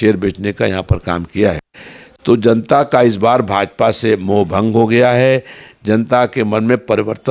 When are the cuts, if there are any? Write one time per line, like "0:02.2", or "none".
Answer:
none